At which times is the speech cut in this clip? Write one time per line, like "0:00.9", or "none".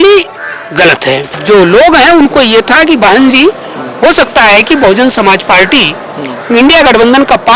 0:01.4

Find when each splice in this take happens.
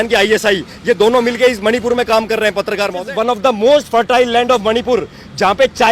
0:03.0

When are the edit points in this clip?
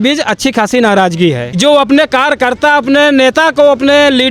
0:01.6

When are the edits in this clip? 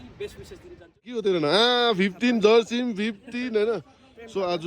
0:01.2

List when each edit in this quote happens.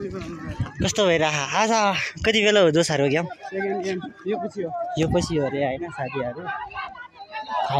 none

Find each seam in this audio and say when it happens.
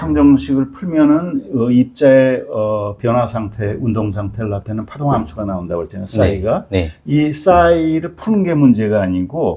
none

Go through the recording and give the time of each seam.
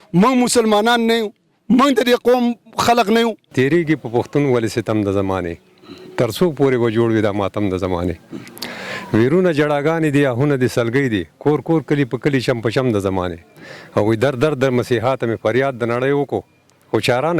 0:03.5

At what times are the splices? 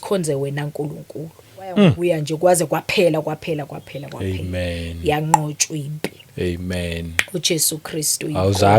0:02.0

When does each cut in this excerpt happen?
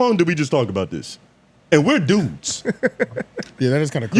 none

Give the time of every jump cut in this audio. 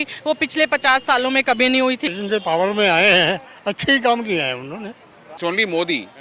0:02.1
0:05.4

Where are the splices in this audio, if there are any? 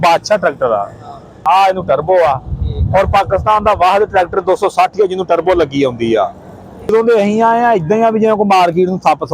0:01.4
0:06.9

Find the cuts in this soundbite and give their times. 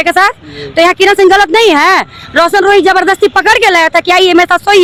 none

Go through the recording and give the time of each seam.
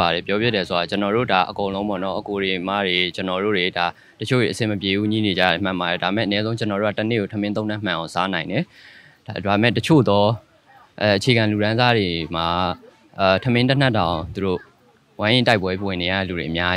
none

